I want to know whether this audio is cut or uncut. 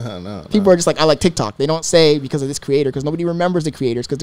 uncut